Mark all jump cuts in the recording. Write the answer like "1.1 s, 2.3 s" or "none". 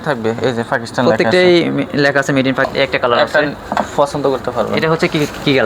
2.7 s